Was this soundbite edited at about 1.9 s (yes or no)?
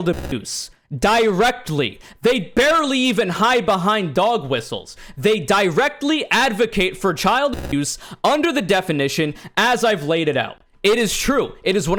no